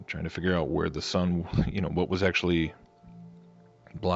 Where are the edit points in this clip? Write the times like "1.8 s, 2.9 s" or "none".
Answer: 2.7 s